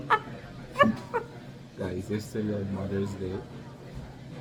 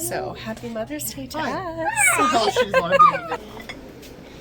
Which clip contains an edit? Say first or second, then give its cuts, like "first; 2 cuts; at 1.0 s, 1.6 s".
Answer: second; 1 cut; at 3.4 s